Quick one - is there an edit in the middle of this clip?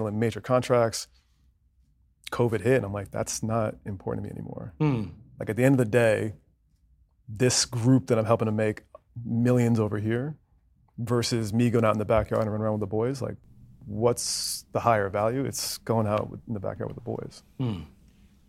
no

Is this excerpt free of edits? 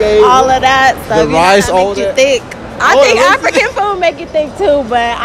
yes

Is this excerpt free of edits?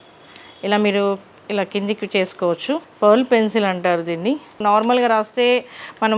no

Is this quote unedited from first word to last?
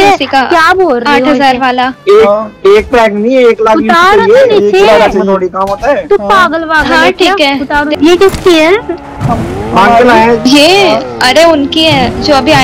no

